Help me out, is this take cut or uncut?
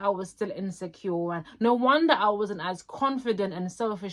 uncut